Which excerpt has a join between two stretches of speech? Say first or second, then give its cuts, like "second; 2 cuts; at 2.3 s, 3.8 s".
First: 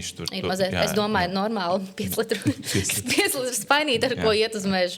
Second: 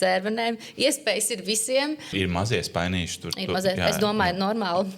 second; 1 cut; at 2.1 s